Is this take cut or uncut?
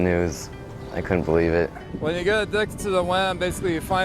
cut